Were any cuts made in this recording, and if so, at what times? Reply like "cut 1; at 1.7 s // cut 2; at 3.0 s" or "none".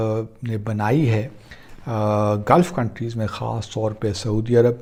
none